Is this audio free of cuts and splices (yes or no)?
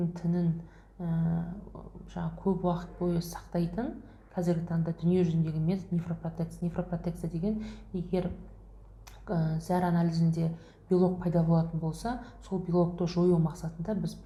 yes